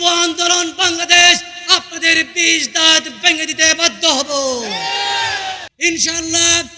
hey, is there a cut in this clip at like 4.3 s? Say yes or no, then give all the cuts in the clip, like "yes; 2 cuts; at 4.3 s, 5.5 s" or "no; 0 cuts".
no; 1 cut; at 5.7 s